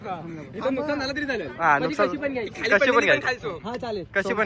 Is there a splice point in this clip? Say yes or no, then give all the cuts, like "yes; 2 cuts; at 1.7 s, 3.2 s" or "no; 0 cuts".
no; 0 cuts